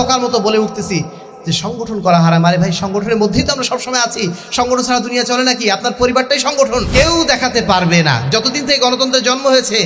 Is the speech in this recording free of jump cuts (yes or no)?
no